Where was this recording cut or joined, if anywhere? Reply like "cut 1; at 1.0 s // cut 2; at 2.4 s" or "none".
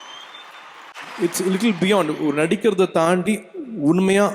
cut 1; at 0.9 s